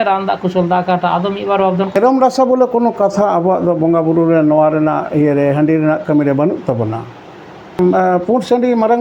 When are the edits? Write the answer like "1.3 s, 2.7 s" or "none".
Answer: 1.9 s, 7.8 s